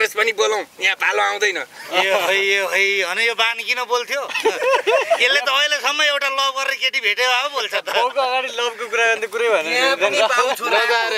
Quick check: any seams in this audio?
no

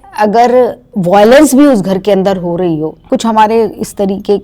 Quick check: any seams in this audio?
yes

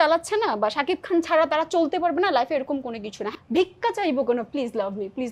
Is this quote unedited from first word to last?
no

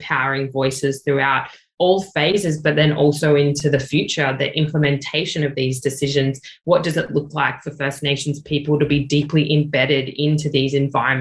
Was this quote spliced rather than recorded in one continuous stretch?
no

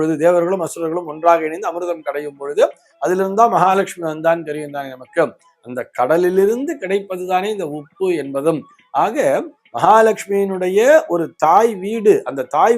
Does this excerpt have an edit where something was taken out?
no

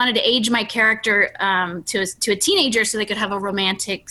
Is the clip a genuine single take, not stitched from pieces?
yes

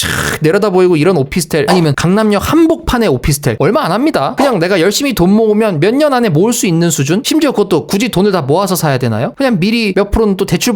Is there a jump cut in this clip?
no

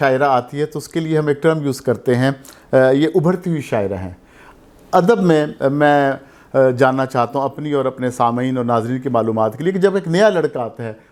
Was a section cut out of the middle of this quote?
no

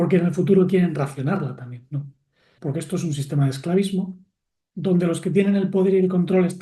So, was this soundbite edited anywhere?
yes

